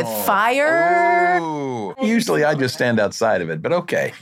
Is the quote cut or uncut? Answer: cut